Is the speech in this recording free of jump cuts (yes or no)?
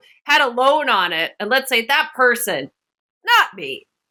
yes